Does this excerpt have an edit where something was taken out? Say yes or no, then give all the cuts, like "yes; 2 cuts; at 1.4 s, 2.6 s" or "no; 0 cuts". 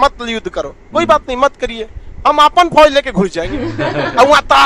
no; 0 cuts